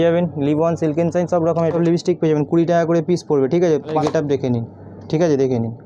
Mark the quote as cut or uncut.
cut